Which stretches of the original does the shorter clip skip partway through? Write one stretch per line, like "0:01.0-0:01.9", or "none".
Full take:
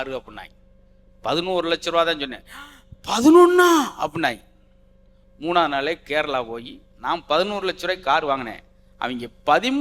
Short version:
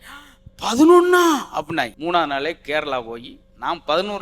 0:04.4-0:05.4

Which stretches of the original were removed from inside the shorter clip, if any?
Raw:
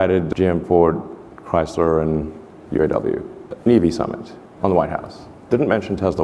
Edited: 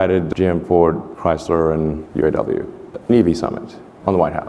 0:01.1-0:01.4
0:02.3-0:02.6

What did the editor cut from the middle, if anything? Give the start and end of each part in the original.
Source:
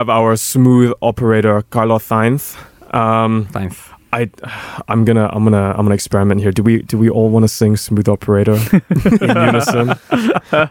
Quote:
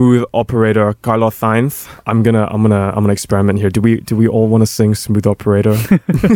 0:02.6-0:04.7

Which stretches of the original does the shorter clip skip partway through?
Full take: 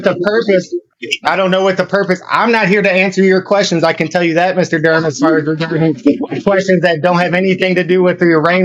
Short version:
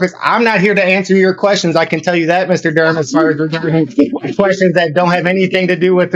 none

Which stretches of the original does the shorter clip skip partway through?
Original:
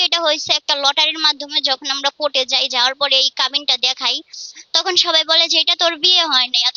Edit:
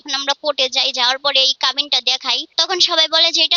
0:04.2-0:04.6

